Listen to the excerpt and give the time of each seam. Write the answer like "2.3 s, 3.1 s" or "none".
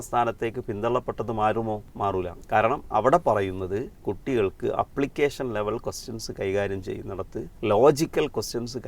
2.1 s, 3.9 s, 7.4 s